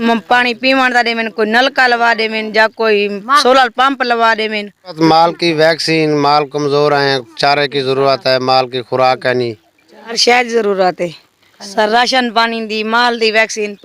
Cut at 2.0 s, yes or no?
no